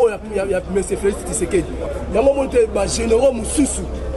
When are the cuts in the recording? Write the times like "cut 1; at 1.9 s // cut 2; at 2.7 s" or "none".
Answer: cut 1; at 1.8 s